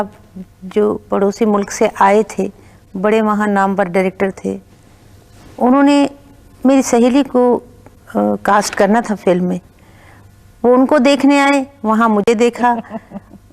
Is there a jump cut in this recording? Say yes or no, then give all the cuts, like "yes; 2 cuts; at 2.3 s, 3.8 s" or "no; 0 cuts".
no; 0 cuts